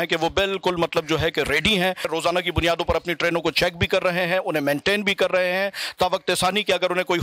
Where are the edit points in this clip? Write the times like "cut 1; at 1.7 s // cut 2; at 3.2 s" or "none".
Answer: cut 1; at 2.1 s